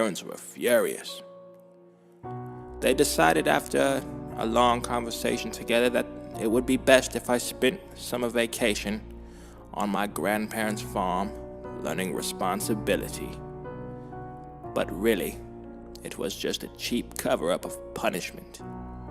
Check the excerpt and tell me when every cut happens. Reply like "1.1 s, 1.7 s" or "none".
14.0 s